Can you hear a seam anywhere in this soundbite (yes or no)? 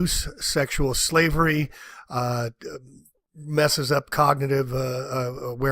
yes